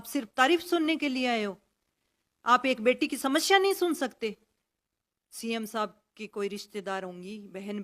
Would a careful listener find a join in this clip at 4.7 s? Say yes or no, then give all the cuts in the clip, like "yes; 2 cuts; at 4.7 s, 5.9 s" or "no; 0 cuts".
yes; 1 cut; at 4.7 s